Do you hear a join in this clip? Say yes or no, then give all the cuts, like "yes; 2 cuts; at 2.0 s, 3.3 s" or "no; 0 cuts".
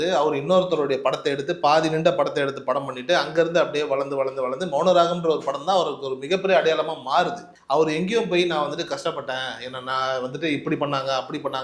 no; 0 cuts